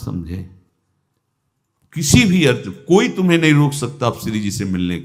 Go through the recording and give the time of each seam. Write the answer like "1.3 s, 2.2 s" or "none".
none